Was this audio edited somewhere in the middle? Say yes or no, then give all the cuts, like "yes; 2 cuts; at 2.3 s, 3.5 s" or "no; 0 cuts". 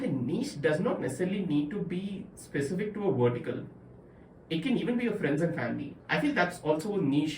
yes; 1 cut; at 6.0 s